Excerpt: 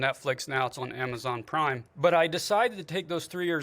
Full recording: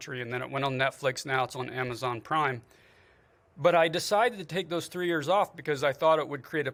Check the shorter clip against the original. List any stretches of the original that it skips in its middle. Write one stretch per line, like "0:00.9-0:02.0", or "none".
0:02.6-0:03.5